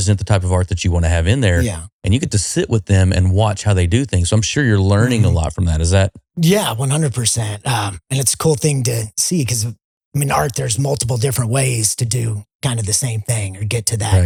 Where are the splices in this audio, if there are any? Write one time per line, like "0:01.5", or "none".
none